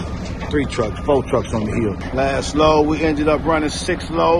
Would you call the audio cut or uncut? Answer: cut